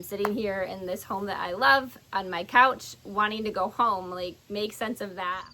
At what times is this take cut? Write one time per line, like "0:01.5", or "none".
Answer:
none